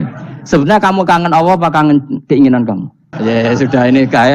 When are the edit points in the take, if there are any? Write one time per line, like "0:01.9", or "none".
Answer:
0:03.1